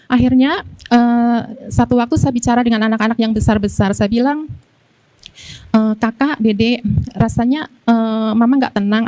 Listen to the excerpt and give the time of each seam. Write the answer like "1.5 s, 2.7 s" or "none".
none

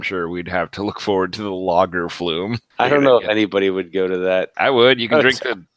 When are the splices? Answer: 2.6 s, 4.5 s

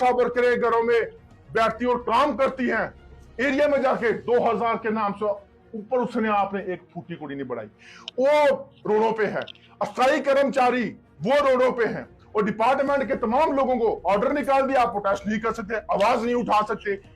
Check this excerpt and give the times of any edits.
3.6 s

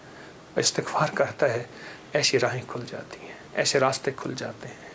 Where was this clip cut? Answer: none

